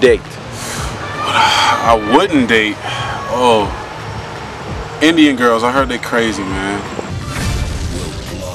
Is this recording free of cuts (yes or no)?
yes